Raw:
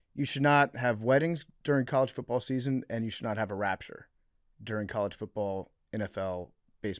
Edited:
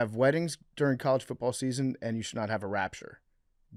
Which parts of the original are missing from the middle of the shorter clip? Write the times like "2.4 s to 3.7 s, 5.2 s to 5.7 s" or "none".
none